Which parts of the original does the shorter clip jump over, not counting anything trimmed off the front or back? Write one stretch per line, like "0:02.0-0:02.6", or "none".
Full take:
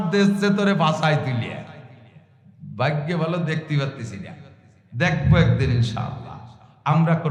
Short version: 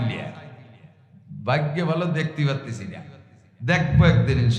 none